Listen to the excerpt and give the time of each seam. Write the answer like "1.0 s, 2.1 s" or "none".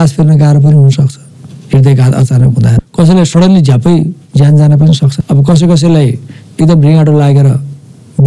2.7 s, 5.2 s